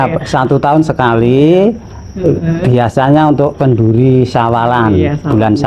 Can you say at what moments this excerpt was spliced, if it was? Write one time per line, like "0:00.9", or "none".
none